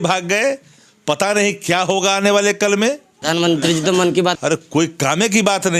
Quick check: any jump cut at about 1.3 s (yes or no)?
no